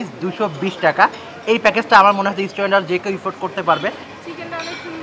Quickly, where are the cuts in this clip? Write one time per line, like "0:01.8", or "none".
0:04.1